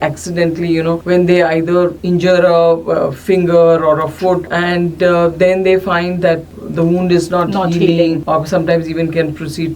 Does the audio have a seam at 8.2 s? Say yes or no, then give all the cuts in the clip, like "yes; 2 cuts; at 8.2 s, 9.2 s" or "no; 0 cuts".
yes; 5 cuts; at 1.0 s, 2.0 s, 4.5 s, 6.5 s, 8.2 s